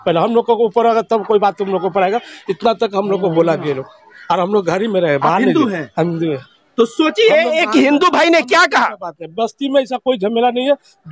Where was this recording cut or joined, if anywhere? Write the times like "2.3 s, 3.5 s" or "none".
none